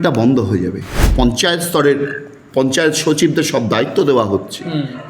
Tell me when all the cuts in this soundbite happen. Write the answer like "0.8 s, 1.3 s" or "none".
1.1 s